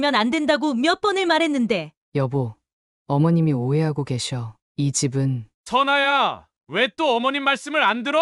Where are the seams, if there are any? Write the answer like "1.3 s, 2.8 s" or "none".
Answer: 1.9 s, 5.5 s